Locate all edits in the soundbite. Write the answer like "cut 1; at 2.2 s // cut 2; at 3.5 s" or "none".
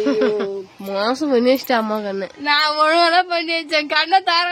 none

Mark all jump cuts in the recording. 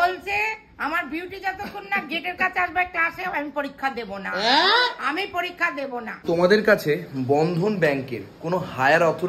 cut 1; at 6.2 s

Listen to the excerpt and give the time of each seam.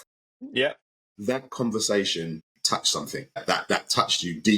cut 1; at 1.0 s // cut 2; at 2.5 s

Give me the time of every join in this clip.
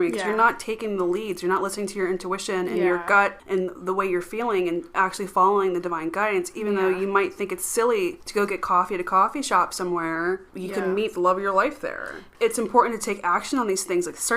cut 1; at 3.4 s // cut 2; at 8.2 s // cut 3; at 10.5 s // cut 4; at 12.2 s

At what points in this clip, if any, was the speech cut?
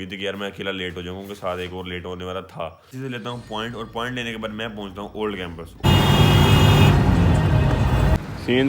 cut 1; at 2.9 s // cut 2; at 5.8 s

